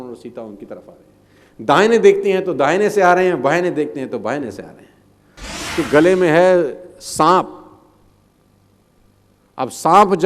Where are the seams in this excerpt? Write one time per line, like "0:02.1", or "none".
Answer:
0:05.5